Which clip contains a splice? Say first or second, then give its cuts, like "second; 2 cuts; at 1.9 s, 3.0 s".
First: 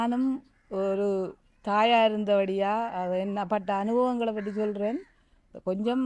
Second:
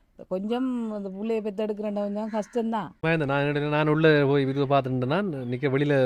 second; 1 cut; at 2.9 s